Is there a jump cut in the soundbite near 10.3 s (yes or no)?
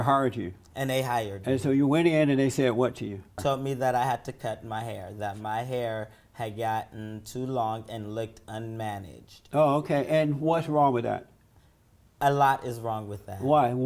no